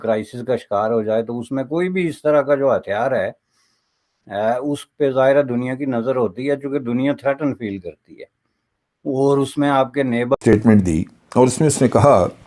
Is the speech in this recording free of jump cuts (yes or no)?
no